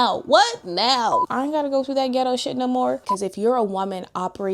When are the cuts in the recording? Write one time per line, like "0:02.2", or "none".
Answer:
0:01.2
0:03.1